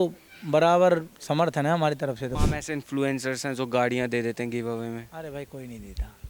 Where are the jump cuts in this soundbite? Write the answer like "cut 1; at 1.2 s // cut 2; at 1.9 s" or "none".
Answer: cut 1; at 2.3 s